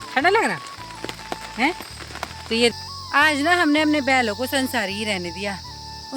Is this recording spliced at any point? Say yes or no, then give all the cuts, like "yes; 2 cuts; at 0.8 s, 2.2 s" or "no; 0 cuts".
yes; 1 cut; at 2.7 s